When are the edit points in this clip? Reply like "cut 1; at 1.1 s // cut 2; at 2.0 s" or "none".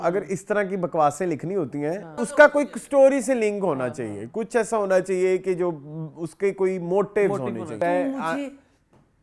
cut 1; at 2.3 s // cut 2; at 7.7 s